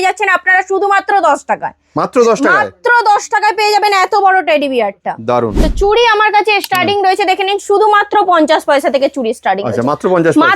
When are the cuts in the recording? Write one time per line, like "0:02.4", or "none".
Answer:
0:05.6